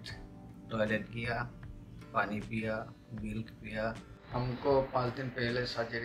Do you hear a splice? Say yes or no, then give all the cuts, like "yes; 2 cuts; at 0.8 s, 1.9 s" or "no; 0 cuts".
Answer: yes; 1 cut; at 4.1 s